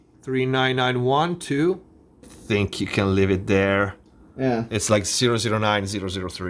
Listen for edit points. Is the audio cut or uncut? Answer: uncut